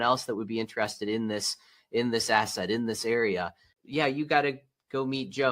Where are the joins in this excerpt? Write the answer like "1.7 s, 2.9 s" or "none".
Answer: 3.7 s